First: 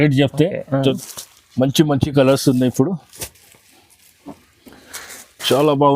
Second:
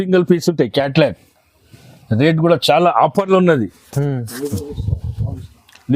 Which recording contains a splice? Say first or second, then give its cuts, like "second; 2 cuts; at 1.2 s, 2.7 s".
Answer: first; 1 cut; at 1.0 s